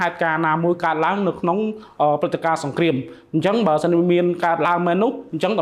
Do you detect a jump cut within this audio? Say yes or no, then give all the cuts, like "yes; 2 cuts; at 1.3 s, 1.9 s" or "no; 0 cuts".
no; 0 cuts